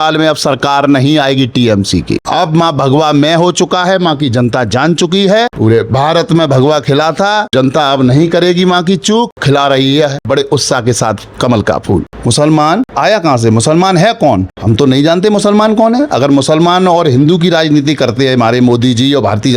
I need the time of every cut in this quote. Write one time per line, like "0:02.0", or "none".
0:02.2
0:05.5
0:07.5
0:09.4
0:10.2
0:12.1
0:12.9
0:14.5